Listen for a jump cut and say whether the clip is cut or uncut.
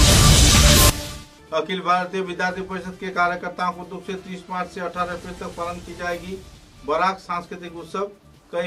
cut